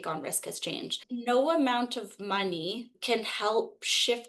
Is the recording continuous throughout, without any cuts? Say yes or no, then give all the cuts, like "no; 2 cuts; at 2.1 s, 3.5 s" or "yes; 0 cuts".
no; 2 cuts; at 1.1 s, 2.9 s